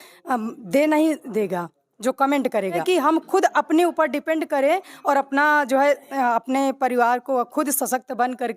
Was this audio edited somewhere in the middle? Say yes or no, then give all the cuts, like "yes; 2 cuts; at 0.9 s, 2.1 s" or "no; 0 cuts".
yes; 1 cut; at 2.8 s